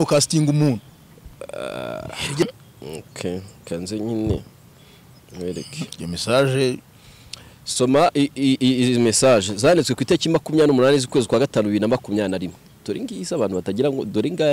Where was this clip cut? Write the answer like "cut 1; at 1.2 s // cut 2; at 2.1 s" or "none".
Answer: cut 1; at 2.4 s